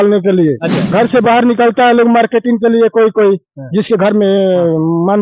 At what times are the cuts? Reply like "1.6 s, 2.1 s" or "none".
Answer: 0.9 s